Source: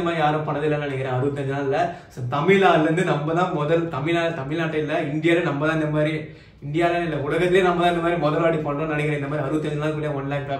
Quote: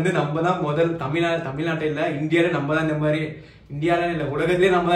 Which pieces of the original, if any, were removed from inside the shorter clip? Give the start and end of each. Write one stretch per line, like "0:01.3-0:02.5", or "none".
none